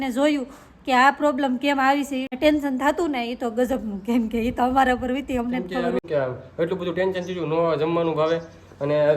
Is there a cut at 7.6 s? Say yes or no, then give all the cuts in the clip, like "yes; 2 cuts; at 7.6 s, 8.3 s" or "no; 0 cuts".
no; 2 cuts; at 2.3 s, 6.0 s